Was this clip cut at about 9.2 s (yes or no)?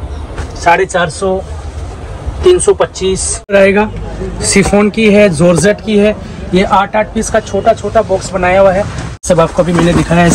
yes